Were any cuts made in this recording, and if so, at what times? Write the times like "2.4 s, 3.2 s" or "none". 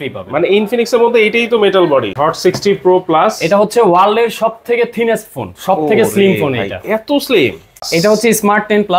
2.1 s, 7.9 s